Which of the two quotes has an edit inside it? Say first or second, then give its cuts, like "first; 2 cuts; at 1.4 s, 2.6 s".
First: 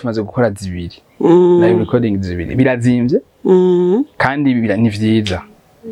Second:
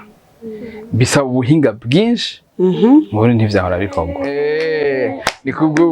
second; 1 cut; at 4.1 s